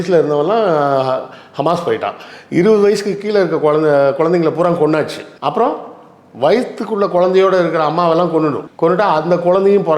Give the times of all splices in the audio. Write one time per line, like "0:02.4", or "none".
0:05.2
0:08.7